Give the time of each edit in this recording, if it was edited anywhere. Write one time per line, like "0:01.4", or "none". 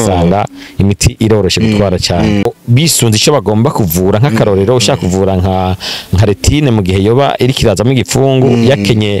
0:02.4